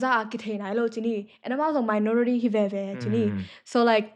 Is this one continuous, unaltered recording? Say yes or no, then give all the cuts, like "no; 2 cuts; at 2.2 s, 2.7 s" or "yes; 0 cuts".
yes; 0 cuts